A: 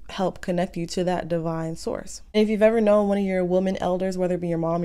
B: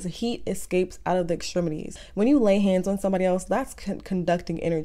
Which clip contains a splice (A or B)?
B